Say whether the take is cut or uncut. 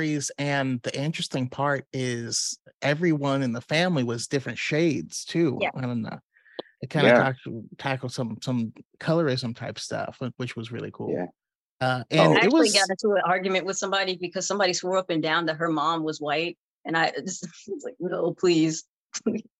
uncut